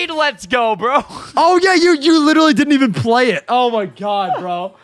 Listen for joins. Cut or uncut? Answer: uncut